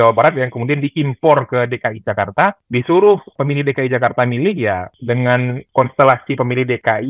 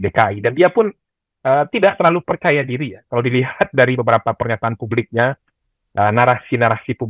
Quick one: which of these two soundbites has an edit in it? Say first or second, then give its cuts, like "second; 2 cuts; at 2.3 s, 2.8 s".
first; 4 cuts; at 2.6 s, 3.3 s, 4.9 s, 5.6 s